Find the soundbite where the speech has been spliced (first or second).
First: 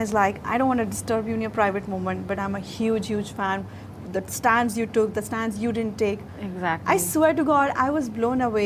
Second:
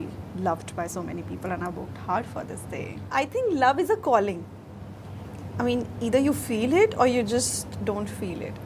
second